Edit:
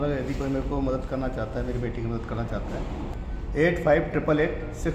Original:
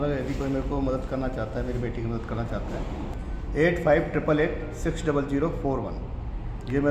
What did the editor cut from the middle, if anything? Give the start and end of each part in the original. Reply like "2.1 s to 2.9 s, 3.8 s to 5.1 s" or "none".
none